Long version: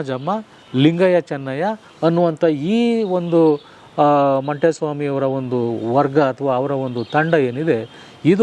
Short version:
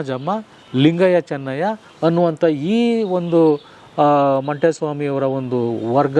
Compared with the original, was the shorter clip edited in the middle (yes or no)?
no